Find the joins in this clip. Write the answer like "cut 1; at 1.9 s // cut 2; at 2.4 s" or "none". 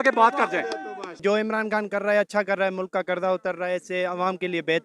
cut 1; at 1.2 s